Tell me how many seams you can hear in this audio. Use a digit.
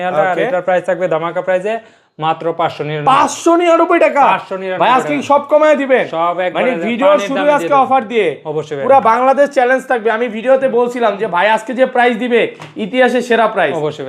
0